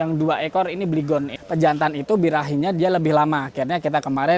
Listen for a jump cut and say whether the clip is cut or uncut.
cut